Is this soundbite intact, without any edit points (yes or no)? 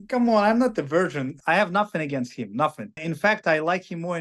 no